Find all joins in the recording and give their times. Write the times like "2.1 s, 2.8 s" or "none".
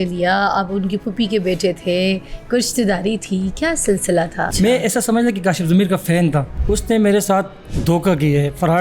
4.5 s, 6.5 s, 7.6 s

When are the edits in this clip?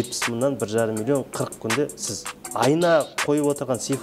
none

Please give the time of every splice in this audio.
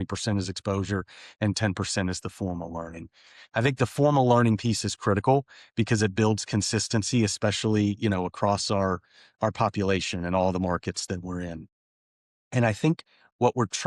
none

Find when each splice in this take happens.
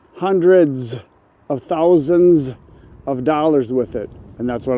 none

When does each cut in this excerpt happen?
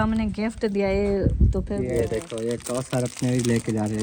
1.8 s

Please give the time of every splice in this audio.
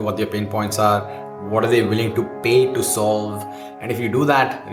none

